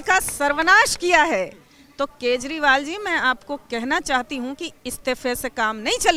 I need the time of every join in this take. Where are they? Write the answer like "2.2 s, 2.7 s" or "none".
none